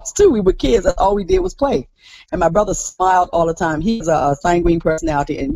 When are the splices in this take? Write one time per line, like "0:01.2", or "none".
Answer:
none